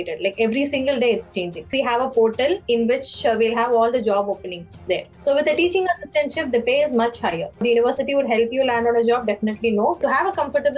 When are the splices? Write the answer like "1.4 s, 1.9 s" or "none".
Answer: 1.7 s, 5.1 s, 7.6 s, 10.0 s